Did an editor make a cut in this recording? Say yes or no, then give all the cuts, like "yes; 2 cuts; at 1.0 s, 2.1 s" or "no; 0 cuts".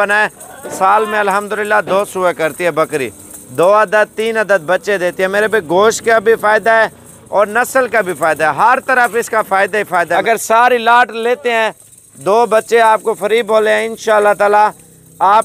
yes; 1 cut; at 10.1 s